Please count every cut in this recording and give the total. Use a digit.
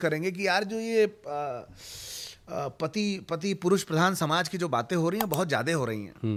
0